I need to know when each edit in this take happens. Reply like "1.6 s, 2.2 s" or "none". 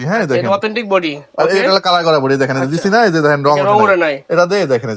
none